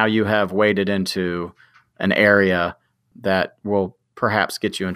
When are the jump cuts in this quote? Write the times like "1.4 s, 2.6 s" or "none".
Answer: 3.1 s